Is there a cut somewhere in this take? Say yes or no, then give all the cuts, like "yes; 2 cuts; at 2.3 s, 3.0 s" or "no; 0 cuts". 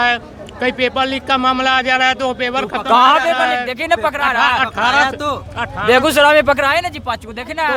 no; 0 cuts